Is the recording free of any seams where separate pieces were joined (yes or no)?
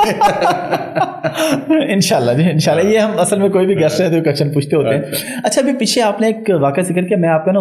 yes